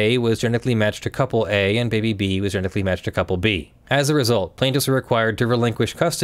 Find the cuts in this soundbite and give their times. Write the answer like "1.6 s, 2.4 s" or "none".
3.7 s

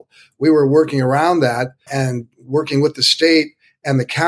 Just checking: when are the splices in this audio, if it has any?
1.8 s

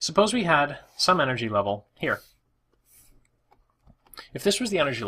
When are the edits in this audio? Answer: 1.6 s

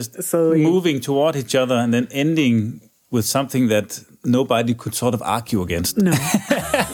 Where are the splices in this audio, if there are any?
none

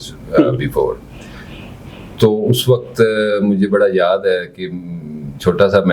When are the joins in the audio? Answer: none

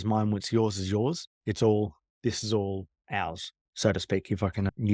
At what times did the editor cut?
none

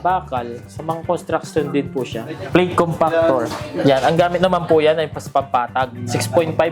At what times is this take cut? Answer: 2.3 s

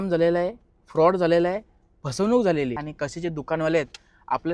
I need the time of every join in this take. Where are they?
2.9 s

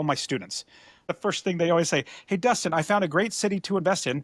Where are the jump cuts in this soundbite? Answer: 1.1 s

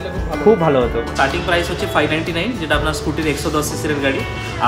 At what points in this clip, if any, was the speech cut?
1.0 s

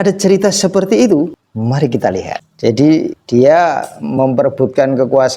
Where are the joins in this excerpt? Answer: 1.4 s, 2.5 s, 3.2 s

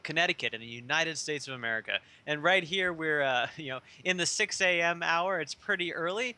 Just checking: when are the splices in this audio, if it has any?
none

